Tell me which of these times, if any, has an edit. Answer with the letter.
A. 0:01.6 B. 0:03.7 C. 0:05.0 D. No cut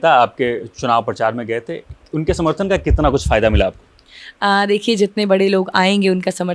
D